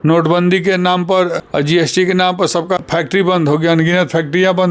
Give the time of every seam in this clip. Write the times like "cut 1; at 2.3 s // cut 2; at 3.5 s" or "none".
cut 1; at 1.4 s // cut 2; at 2.8 s